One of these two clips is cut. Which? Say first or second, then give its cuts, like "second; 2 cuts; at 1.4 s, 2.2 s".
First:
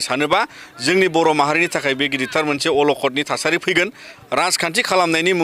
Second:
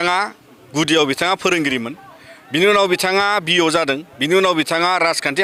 first; 1 cut; at 4.1 s